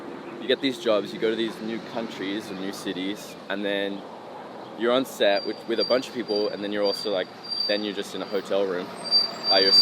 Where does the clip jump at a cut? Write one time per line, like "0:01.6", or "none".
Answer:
none